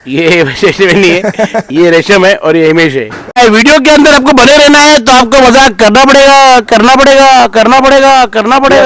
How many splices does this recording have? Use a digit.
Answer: 1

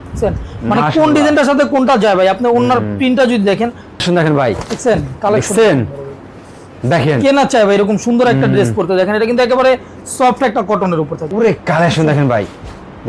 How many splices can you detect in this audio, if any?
2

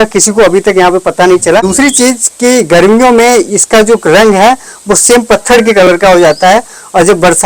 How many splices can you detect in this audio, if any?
1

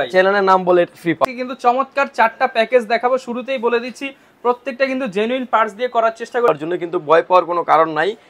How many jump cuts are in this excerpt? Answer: 2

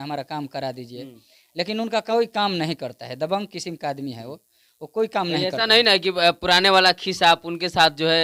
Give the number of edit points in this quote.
0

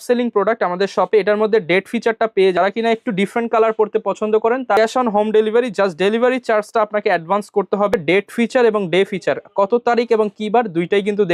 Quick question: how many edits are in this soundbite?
3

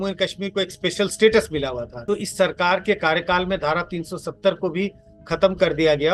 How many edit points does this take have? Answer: 1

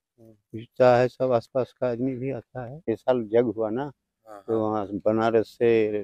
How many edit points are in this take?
0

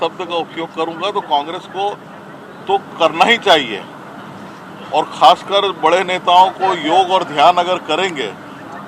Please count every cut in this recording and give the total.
0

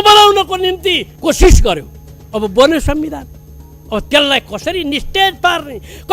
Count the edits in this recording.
1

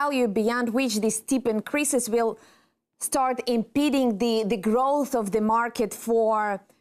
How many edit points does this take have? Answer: 1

